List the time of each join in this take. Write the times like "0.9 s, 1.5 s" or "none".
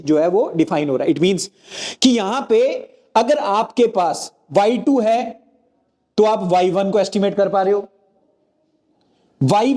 none